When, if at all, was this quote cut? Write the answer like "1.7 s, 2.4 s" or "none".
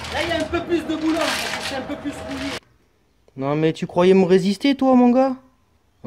2.6 s

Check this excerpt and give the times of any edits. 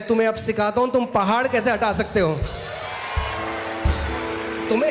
none

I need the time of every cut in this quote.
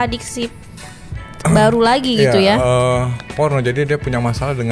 none

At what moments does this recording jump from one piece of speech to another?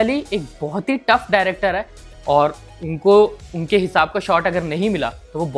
none

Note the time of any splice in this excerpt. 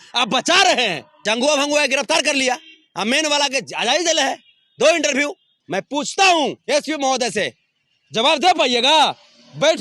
1.1 s, 5.5 s

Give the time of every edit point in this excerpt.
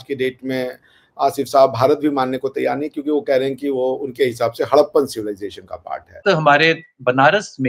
6.2 s

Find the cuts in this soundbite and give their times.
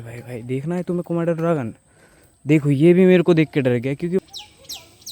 4.2 s

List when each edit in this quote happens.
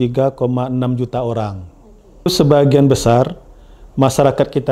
2.3 s

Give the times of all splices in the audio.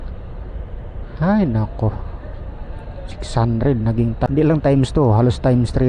4.3 s

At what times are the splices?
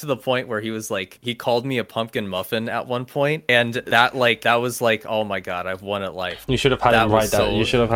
none

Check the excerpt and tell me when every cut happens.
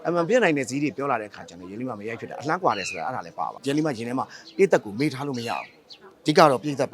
3.5 s

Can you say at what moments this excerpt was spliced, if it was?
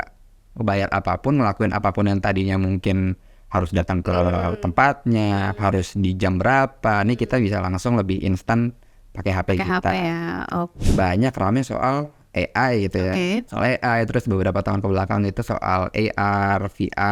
10.4 s, 13.5 s

